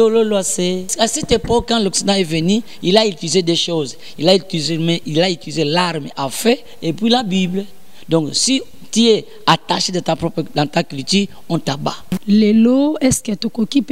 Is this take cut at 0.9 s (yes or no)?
yes